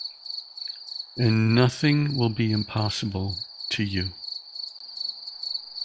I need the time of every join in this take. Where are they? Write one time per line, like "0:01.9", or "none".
0:04.8